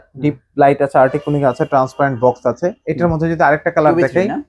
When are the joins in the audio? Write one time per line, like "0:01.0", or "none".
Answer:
0:02.8